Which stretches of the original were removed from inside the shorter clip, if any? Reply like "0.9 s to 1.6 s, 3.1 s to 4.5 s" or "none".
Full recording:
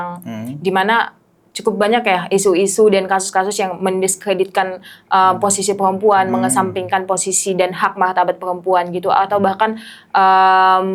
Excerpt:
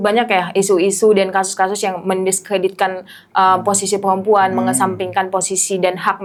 none